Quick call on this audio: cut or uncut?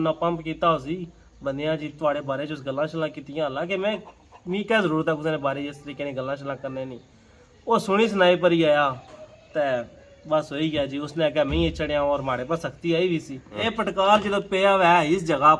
cut